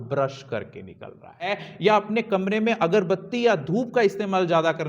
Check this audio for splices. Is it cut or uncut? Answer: cut